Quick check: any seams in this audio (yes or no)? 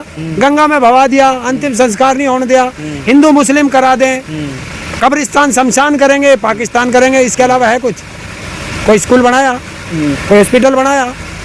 no